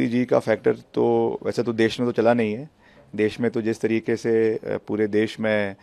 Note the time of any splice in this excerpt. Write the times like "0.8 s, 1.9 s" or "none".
none